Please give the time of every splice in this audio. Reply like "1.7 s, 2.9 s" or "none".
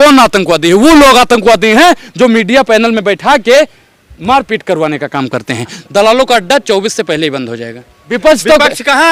5.8 s, 8.0 s